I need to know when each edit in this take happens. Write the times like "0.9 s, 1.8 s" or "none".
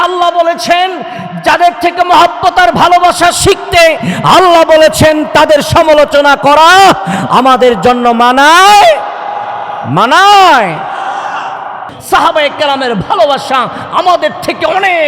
11.9 s